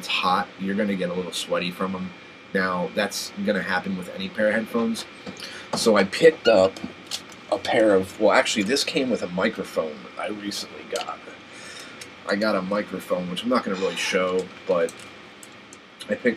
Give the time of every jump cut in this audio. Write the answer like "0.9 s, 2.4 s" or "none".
5.1 s